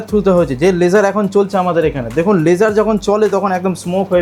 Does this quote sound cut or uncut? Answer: uncut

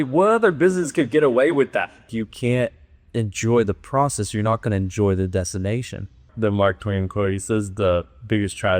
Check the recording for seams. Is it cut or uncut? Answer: cut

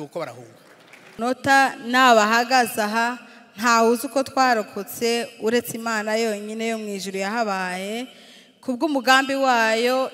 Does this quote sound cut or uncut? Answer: cut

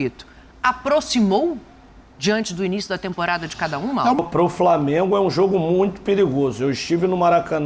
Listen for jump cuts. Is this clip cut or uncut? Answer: cut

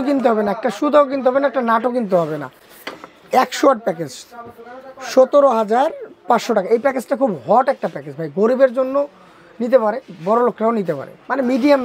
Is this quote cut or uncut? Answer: uncut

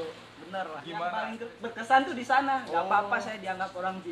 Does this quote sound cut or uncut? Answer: cut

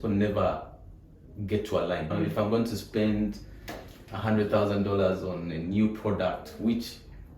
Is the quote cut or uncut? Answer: uncut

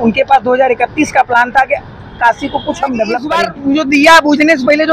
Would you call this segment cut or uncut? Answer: cut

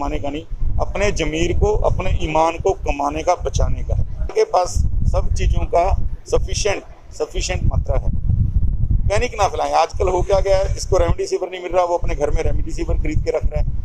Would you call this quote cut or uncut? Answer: cut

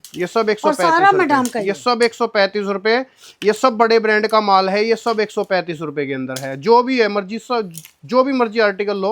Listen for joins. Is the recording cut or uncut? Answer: uncut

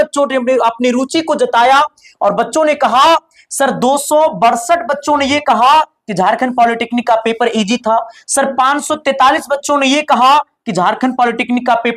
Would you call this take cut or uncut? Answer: uncut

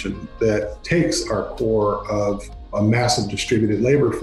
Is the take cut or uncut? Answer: cut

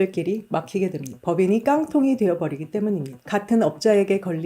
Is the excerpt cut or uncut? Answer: cut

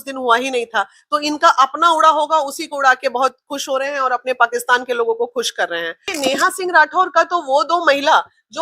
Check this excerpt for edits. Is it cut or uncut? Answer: cut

